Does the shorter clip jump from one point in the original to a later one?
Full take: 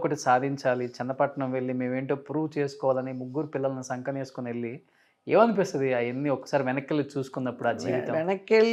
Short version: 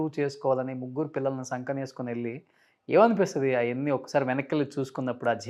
no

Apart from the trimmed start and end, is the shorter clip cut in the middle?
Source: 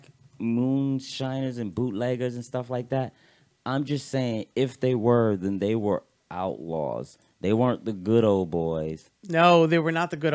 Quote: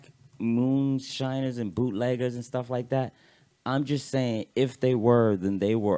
no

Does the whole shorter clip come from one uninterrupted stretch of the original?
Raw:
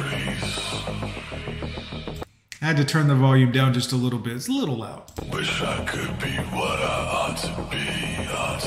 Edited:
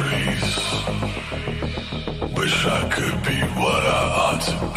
no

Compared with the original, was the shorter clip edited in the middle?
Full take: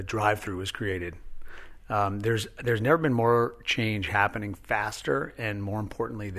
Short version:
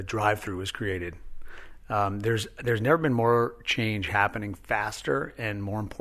no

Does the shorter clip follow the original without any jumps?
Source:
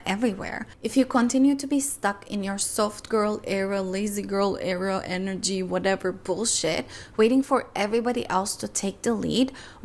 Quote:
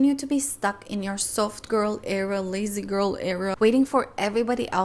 no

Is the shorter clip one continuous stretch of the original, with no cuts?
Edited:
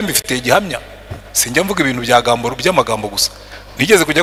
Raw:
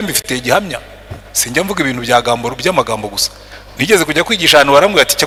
yes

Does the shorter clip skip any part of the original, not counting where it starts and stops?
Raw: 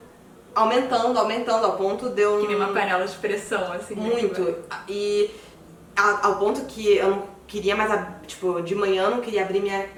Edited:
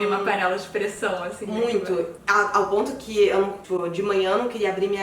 yes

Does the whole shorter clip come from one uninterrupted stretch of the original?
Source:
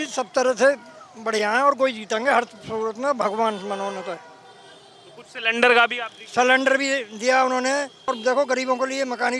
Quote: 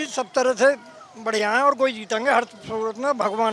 yes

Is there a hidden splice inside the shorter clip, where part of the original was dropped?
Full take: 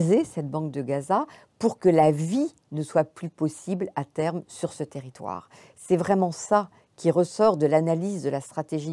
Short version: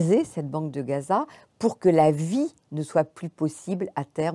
no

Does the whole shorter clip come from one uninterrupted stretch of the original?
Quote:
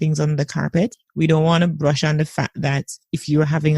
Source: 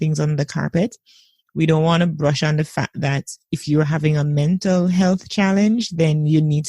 no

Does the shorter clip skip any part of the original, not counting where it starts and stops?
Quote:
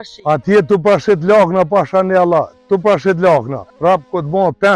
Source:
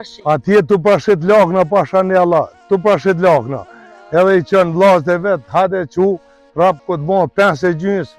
yes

